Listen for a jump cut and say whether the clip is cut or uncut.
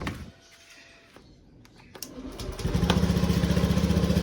cut